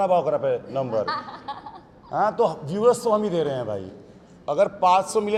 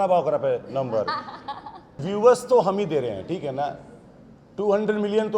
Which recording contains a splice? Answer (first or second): second